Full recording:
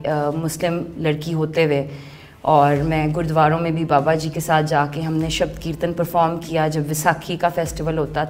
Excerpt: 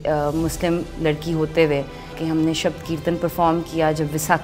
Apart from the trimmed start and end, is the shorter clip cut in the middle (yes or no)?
yes